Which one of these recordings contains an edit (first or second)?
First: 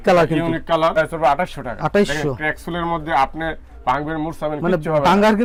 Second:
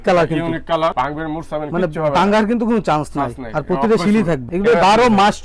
second